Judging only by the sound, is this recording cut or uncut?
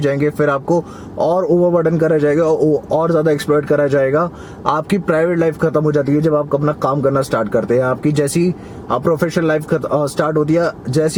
uncut